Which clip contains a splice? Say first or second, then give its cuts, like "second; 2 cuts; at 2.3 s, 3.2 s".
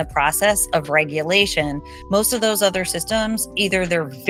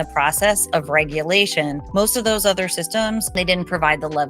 second; 2 cuts; at 1.8 s, 3.3 s